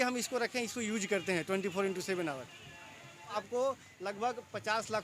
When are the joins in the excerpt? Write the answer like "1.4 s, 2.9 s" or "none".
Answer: 3.3 s